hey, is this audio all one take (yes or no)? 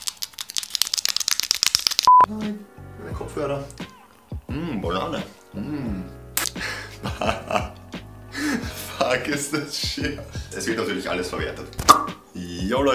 yes